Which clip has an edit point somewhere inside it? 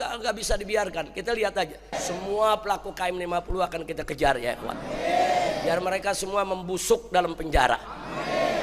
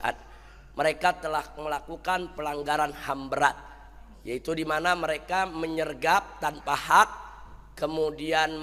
first; 1 cut; at 2.0 s

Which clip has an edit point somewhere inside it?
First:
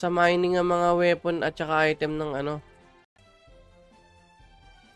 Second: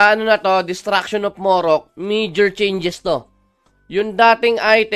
first; 1 cut; at 3.1 s

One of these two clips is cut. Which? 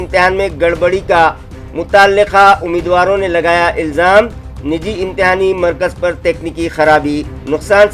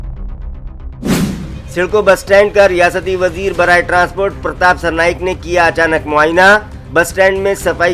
second; 1 cut; at 1.3 s

